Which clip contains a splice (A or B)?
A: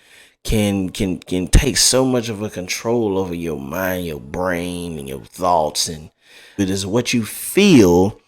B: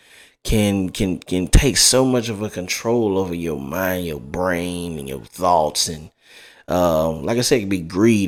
A